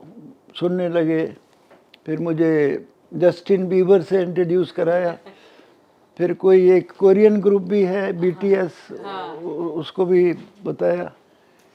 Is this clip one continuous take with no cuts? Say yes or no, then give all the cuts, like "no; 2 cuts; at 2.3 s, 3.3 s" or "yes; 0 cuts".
yes; 0 cuts